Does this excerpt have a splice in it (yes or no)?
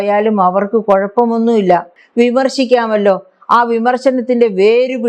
yes